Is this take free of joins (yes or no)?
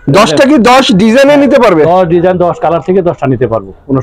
yes